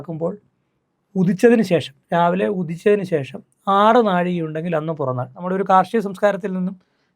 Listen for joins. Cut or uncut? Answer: cut